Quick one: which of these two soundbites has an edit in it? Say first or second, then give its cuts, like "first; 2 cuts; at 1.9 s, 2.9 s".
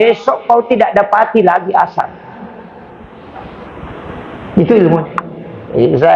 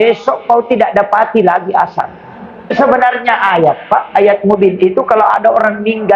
second; 1 cut; at 2.7 s